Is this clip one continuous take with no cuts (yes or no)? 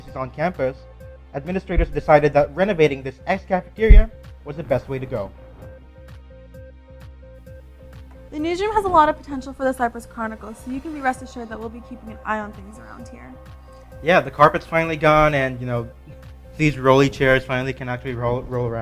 no